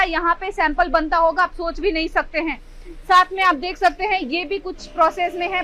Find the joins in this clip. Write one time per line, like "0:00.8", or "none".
none